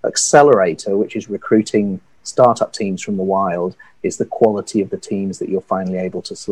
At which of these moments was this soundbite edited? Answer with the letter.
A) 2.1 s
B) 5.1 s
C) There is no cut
C